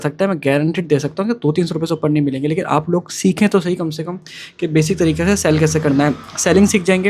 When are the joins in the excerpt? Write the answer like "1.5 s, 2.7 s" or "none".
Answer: none